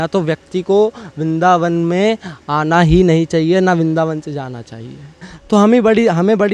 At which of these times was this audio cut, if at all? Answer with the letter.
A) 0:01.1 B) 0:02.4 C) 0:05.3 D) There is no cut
C